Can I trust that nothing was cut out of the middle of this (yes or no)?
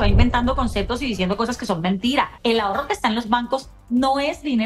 no